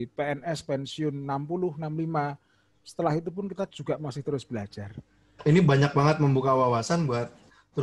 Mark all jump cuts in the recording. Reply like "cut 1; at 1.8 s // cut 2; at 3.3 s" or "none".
cut 1; at 5.4 s